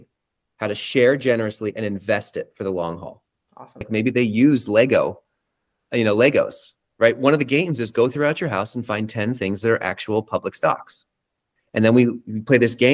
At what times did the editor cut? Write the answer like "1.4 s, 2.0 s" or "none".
3.9 s

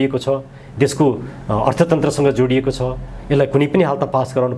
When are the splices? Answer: none

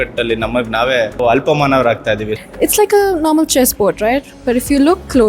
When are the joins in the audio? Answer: 1.2 s, 2.3 s

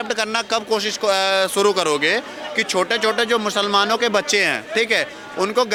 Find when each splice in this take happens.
none

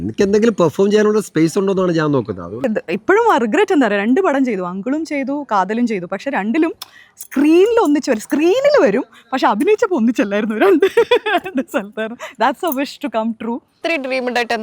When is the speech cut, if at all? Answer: 2.7 s, 13.7 s

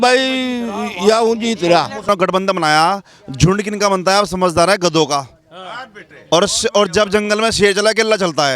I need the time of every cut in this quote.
2.1 s

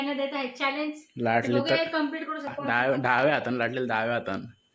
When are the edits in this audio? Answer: 2.6 s

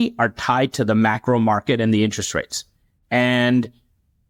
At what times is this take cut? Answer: none

